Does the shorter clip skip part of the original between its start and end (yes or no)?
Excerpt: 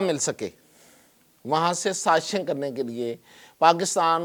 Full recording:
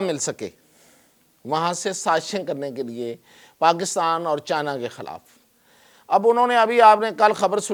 no